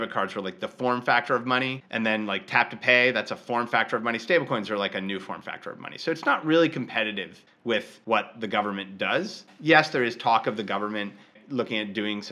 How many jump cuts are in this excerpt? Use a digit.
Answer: 3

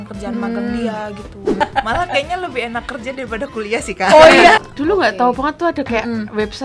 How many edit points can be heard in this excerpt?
2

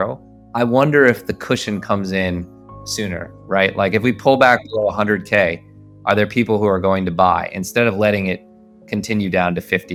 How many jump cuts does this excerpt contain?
0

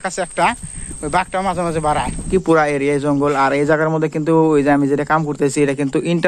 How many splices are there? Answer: 1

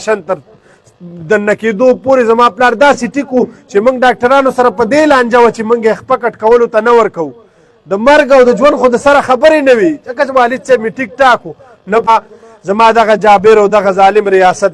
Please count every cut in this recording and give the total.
1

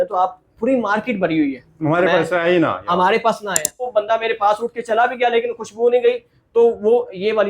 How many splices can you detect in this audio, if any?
1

